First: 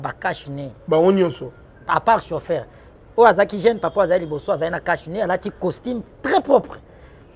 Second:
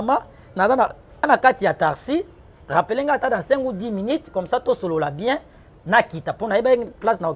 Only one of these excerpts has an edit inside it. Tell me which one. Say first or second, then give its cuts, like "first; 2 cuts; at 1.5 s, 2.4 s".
second; 1 cut; at 1.2 s